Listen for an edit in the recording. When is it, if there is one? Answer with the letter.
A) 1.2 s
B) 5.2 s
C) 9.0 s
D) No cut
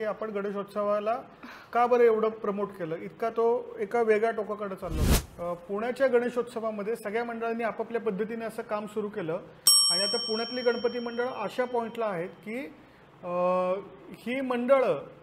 B